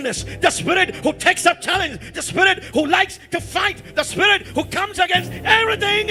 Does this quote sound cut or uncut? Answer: uncut